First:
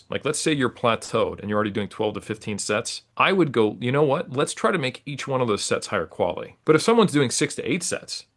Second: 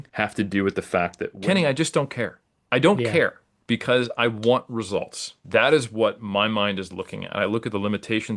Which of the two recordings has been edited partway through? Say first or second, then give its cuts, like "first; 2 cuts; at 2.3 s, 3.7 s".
second; 3 cuts; at 1.3 s, 3.5 s, 5.4 s